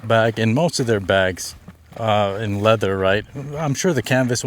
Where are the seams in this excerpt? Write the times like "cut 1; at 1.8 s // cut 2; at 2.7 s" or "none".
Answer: none